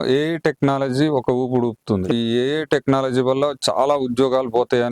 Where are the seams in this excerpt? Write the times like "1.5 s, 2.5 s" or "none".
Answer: 2.1 s